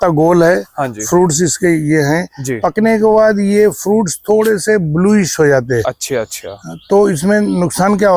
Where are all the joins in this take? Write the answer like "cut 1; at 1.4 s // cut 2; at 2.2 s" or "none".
none